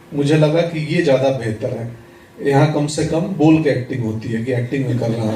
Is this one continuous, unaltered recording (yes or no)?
yes